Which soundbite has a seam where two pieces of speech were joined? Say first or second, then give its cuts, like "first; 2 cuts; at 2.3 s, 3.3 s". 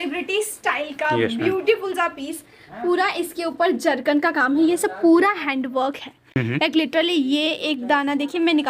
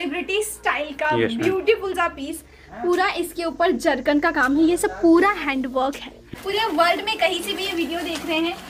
second; 1 cut; at 6.2 s